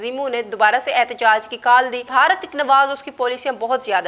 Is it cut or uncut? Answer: cut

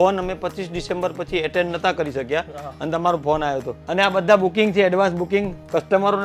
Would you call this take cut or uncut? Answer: cut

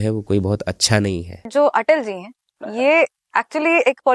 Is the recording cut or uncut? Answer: cut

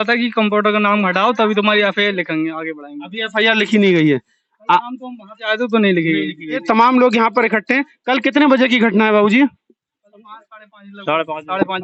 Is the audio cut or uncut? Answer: uncut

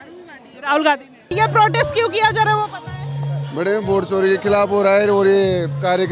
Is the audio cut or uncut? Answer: cut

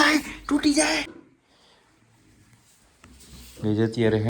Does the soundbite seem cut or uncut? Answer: cut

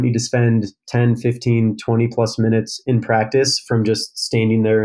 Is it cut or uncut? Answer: uncut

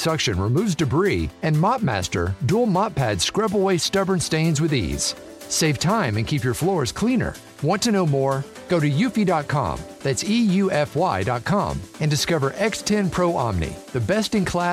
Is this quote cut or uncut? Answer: uncut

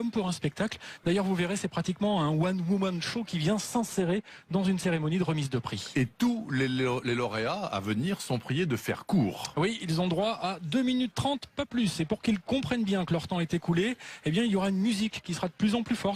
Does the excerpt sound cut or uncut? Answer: uncut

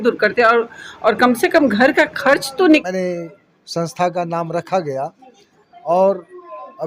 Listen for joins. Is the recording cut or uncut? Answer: cut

